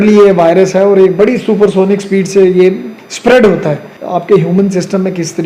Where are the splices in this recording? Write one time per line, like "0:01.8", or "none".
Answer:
0:03.9